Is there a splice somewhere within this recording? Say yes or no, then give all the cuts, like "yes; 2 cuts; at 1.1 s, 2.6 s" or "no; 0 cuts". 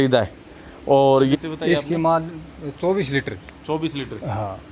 yes; 1 cut; at 1.3 s